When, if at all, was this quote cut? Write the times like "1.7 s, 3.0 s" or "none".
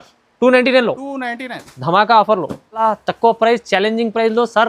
2.8 s